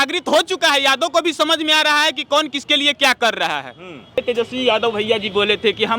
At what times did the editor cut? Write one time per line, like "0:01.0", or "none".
0:04.2